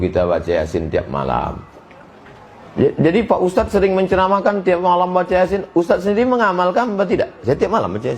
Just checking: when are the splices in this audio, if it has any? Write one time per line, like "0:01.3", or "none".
none